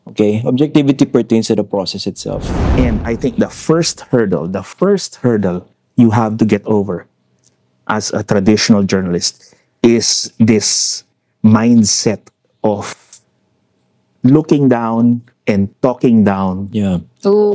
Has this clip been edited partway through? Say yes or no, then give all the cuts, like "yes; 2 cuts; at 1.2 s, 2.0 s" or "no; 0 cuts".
yes; 1 cut; at 2.5 s